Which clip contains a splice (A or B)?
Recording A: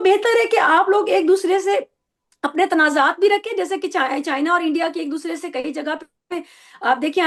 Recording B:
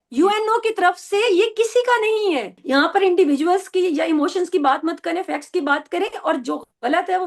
B